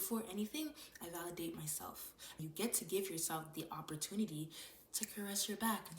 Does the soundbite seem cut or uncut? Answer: cut